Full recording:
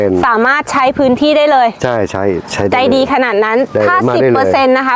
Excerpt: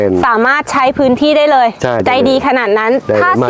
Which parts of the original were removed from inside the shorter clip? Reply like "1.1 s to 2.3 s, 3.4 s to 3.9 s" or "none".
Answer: 2.0 s to 2.7 s